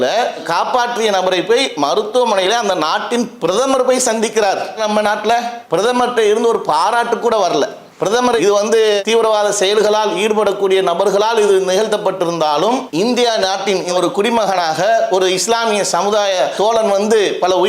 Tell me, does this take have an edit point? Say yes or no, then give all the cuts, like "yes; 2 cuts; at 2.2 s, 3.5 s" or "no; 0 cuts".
no; 0 cuts